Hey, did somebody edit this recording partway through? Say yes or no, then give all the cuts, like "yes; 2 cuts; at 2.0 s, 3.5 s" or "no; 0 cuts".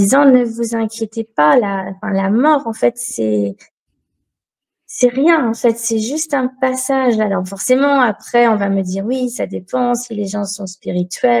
no; 0 cuts